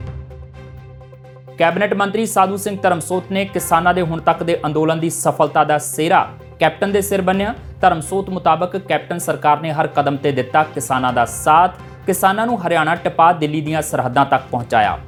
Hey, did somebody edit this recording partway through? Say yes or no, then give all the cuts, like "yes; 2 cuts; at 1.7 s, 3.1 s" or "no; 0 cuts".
no; 0 cuts